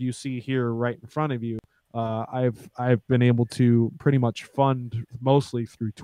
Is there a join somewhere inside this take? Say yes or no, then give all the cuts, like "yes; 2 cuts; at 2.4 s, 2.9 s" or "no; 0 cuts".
no; 0 cuts